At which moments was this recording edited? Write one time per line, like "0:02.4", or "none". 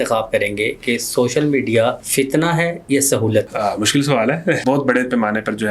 0:02.0
0:03.5
0:04.6